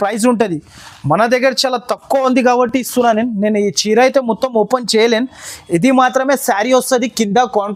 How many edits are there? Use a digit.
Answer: 0